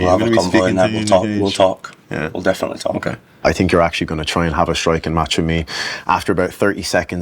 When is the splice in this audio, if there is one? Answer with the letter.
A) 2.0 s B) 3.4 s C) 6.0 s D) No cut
B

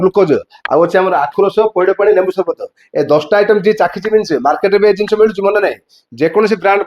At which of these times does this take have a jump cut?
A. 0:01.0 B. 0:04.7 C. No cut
C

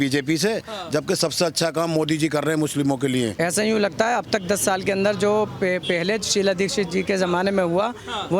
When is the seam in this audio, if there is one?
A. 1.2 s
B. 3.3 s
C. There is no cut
B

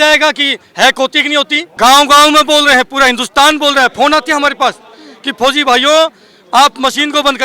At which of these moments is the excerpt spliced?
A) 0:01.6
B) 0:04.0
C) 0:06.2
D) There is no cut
A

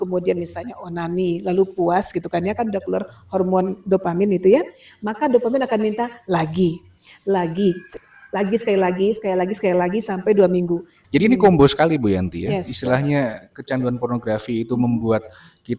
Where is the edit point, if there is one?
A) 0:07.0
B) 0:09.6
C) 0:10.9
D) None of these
C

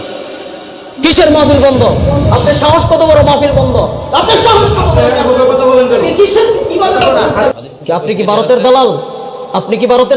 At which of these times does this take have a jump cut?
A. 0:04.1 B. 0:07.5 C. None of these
B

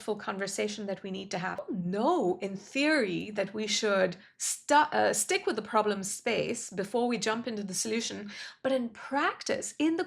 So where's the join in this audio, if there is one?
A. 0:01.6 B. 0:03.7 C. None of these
A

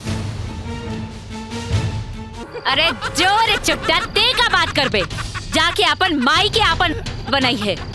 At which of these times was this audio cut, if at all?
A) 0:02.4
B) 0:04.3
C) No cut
A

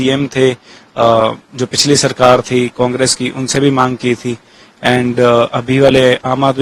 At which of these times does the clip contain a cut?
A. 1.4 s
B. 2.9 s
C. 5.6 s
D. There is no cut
D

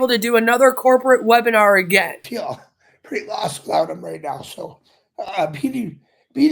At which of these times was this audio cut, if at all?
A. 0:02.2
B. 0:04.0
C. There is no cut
A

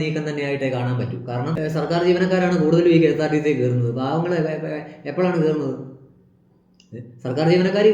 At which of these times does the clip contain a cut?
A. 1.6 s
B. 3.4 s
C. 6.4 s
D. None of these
A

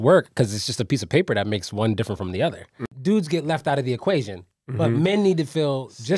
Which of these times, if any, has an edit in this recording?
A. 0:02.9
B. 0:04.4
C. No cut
A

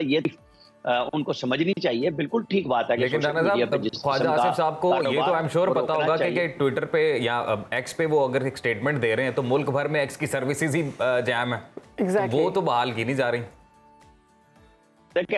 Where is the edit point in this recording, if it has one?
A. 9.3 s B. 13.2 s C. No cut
C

